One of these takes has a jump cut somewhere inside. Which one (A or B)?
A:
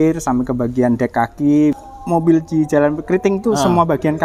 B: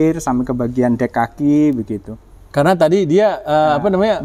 A